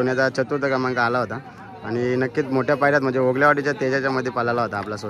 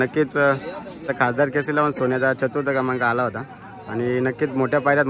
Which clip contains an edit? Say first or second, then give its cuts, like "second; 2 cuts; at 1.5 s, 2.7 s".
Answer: second; 1 cut; at 1.1 s